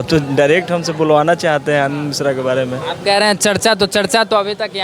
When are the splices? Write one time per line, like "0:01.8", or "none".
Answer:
none